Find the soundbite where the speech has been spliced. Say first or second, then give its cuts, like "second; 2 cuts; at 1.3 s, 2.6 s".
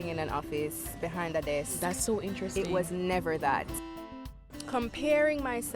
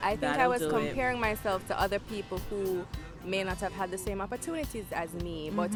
first; 1 cut; at 4.1 s